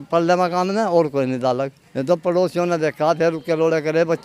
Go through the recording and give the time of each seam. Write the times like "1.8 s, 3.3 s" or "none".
1.8 s